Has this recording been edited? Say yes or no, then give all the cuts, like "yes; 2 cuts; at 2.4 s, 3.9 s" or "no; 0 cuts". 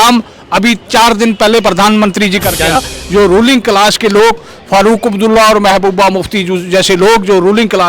yes; 1 cut; at 2.8 s